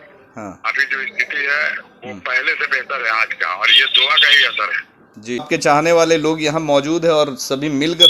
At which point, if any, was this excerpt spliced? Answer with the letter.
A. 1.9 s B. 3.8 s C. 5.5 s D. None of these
C